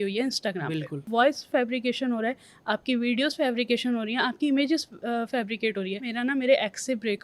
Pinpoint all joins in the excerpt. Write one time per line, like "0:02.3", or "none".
0:01.1
0:06.1